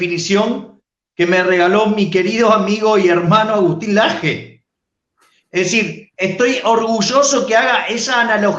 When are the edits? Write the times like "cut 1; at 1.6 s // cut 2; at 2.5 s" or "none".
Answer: none